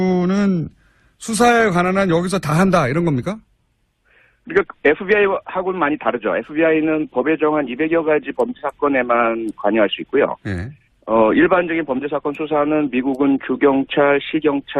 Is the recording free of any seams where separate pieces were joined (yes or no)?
no